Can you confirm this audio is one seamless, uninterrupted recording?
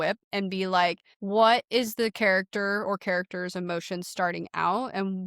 no; 1 cut; at 1.1 s

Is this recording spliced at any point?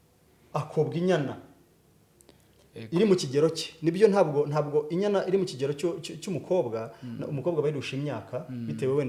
no; 0 cuts

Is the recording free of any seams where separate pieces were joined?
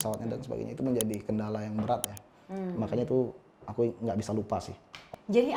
yes; 0 cuts

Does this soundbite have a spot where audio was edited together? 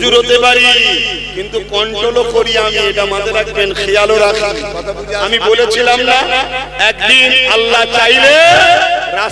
yes; 1 cut; at 5.2 s

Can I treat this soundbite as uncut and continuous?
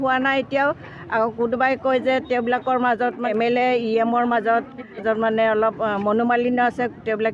no; 2 cuts; at 3.2 s, 5.0 s

